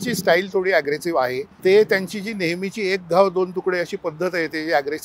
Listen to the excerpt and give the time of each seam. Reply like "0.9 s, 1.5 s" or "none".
1.5 s